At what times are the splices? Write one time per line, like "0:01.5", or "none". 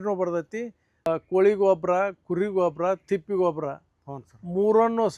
0:01.1